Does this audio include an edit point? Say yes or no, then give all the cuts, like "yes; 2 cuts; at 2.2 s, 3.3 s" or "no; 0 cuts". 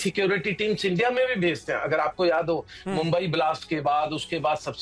no; 0 cuts